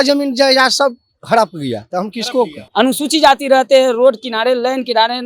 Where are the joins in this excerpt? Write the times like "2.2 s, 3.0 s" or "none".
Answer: 2.6 s